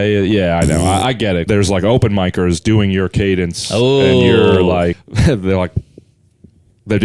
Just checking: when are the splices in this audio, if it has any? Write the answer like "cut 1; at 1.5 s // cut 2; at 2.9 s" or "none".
cut 1; at 1.4 s // cut 2; at 5.0 s